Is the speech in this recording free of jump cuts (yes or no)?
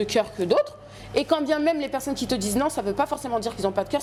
yes